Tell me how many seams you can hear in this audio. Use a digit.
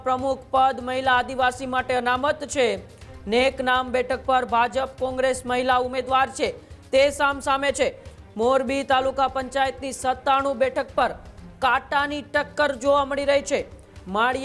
0